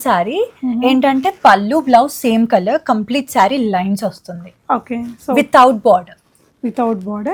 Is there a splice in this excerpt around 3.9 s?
no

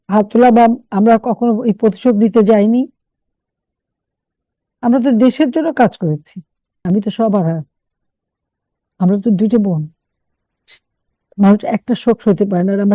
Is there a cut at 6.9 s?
yes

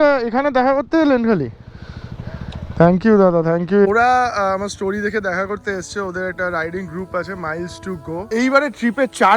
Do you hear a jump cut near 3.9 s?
yes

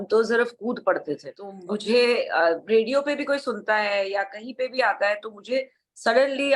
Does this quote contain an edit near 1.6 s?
yes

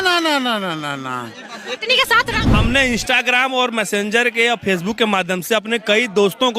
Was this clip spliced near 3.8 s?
no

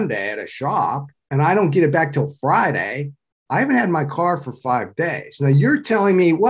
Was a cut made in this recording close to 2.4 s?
no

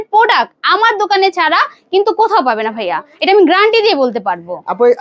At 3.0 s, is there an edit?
no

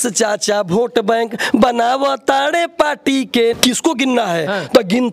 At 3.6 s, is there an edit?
yes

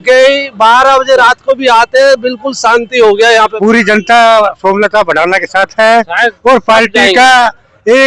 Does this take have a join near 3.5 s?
yes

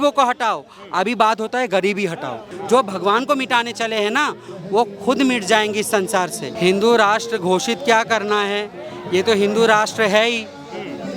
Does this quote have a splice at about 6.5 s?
yes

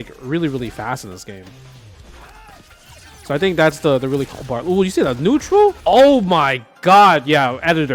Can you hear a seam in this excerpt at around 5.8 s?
no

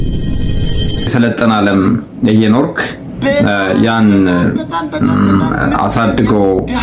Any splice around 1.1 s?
yes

